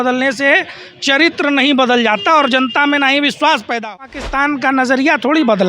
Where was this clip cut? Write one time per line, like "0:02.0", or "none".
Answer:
0:03.9